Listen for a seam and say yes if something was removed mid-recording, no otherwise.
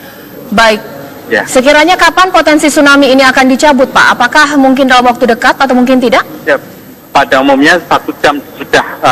yes